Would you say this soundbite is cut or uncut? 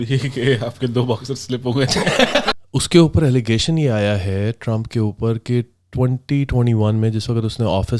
cut